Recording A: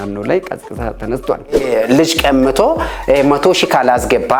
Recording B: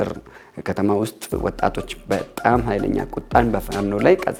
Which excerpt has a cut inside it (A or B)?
A